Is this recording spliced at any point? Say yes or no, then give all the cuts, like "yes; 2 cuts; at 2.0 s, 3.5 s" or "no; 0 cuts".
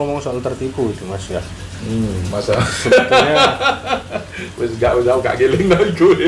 no; 0 cuts